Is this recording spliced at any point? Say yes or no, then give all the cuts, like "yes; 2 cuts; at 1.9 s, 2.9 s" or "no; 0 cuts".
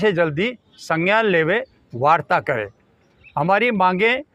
no; 0 cuts